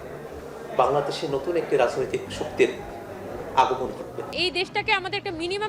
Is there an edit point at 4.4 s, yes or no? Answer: yes